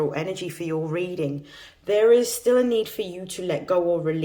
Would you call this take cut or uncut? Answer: uncut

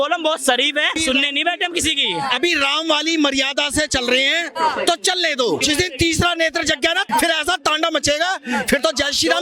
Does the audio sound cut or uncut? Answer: cut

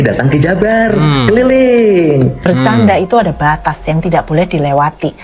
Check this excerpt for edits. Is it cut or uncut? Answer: cut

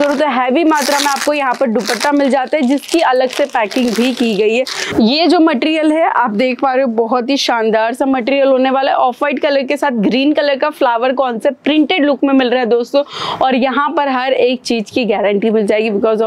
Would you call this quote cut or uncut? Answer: cut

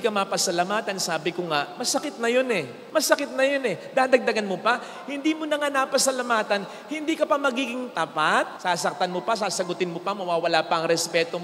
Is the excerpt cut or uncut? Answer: uncut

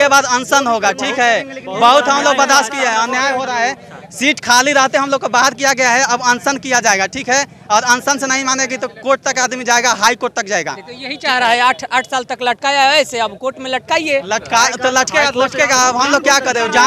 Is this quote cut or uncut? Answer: uncut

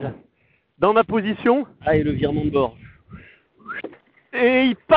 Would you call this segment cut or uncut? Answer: cut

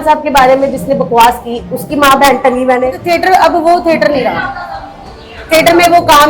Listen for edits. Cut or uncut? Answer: cut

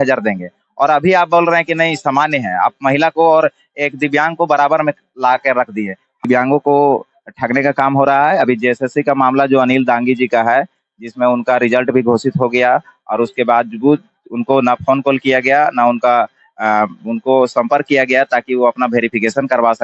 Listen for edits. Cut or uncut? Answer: cut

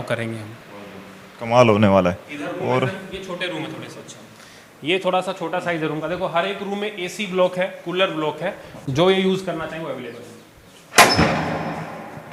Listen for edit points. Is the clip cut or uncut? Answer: uncut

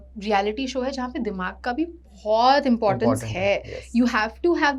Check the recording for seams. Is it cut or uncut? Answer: uncut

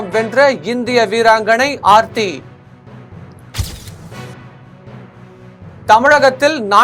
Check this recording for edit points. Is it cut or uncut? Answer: uncut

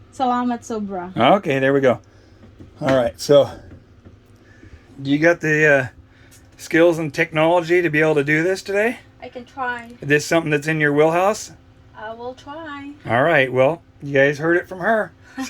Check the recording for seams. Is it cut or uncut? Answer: cut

